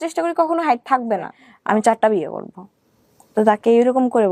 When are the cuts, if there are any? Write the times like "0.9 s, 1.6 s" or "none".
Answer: 1.4 s